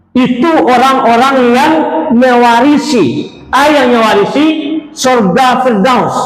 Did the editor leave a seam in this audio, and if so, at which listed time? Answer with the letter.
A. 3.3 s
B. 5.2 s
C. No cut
C